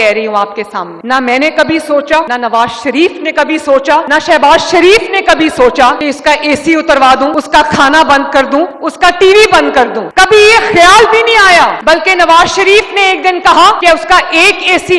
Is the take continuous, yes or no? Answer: yes